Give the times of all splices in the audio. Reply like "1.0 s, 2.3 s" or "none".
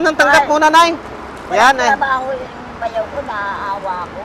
none